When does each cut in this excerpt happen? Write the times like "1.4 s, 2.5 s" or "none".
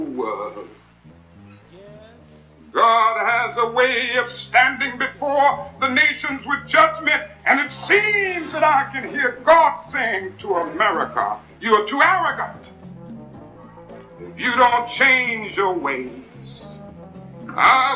none